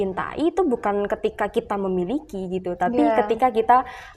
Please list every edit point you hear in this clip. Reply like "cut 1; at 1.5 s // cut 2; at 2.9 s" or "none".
none